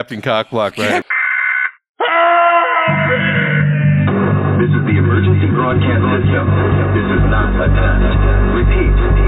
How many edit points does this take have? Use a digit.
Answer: 1